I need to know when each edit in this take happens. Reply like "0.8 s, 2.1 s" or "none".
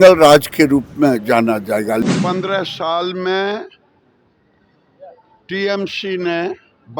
2.0 s

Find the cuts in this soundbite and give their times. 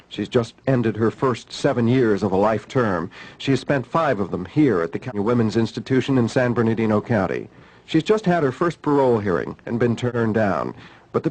10.1 s

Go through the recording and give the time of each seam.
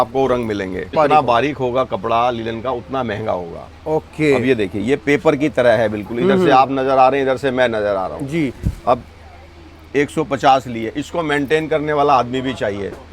0.9 s

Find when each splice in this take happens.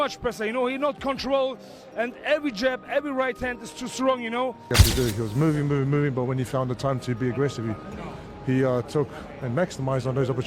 4.6 s

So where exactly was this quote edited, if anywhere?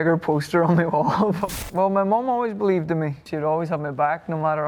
1.5 s, 3.2 s

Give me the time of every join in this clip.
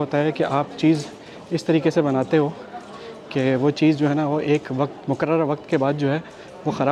none

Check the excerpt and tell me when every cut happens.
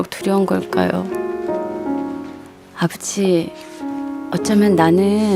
2.1 s

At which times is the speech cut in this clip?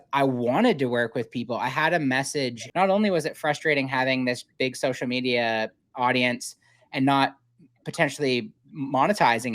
2.6 s

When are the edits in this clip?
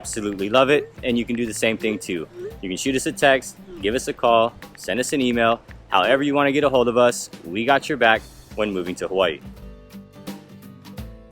9.6 s

